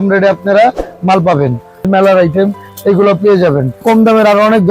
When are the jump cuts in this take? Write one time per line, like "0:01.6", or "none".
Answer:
0:01.9
0:03.8